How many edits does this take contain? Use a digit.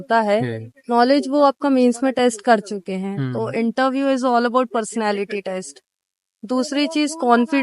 0